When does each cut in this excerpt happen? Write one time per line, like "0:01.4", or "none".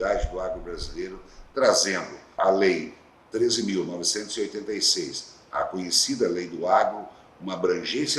0:02.4